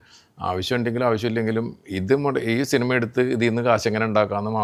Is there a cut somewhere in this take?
no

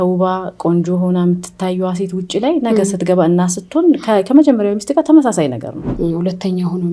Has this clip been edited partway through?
yes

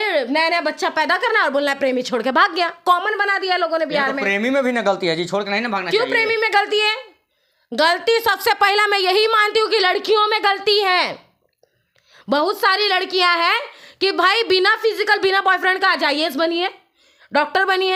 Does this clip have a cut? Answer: no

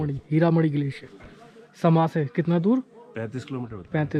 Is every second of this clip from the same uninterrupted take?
yes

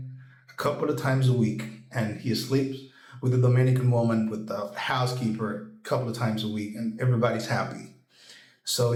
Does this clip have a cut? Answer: no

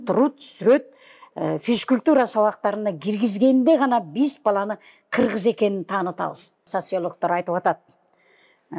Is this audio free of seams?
no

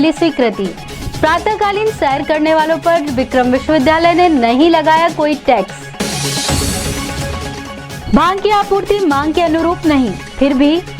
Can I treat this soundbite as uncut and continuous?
no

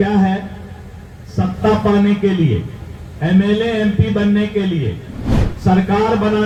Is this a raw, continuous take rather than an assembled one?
yes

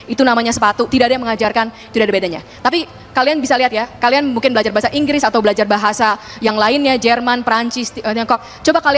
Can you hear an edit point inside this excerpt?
no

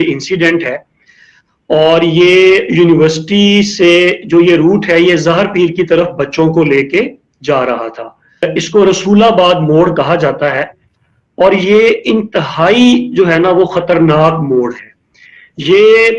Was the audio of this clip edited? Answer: yes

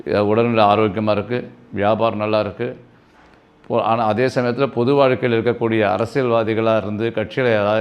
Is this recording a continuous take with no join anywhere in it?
yes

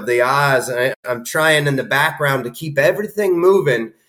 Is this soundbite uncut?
no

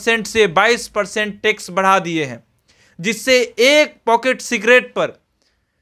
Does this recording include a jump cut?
no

